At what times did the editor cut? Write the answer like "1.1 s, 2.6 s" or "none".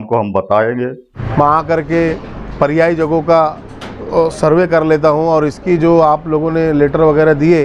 1.2 s

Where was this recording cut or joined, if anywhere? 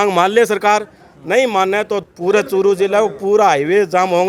2.0 s

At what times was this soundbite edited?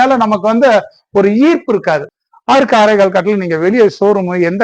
2.1 s

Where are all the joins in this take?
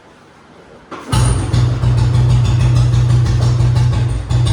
none

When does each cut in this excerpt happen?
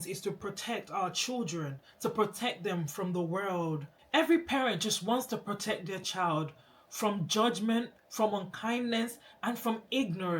3.9 s

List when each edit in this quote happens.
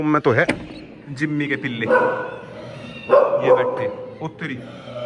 none

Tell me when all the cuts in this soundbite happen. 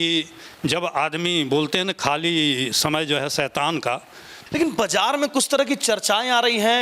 4.3 s

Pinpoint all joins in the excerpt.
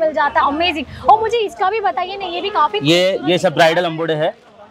none

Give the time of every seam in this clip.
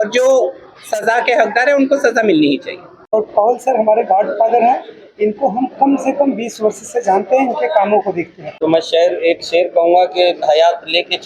3.1 s, 8.4 s

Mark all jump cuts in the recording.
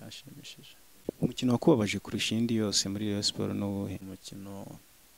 1.0 s, 4.1 s

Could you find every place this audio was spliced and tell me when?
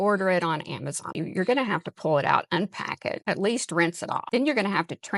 1.1 s, 3.2 s, 4.2 s

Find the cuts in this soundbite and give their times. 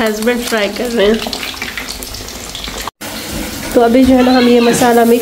3.0 s

